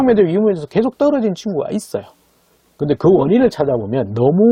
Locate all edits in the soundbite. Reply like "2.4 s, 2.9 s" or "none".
none